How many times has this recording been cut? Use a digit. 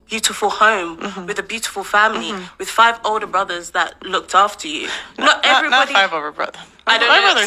0